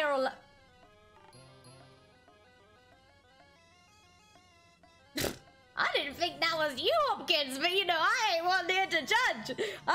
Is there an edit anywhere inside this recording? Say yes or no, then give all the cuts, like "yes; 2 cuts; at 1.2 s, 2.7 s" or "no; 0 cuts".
no; 0 cuts